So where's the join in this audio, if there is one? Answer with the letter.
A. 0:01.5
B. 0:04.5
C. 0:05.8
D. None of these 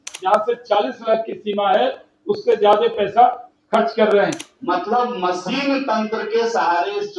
B